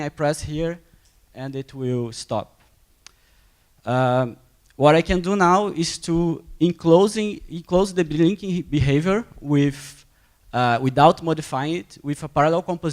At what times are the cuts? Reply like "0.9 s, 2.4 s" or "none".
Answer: 10.1 s